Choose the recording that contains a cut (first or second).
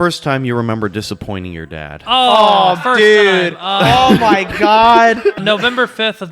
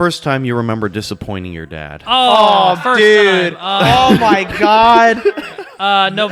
first